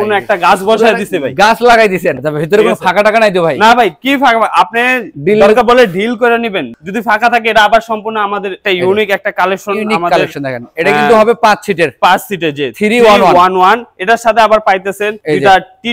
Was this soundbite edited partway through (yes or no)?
yes